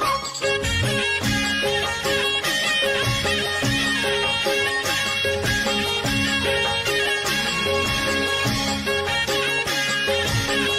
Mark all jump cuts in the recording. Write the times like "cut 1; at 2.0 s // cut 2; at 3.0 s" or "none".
none